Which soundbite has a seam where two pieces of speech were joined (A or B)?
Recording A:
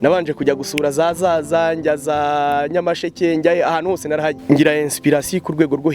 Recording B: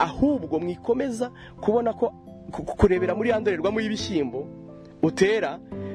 A